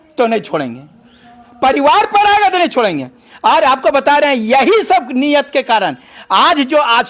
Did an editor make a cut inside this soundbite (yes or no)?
no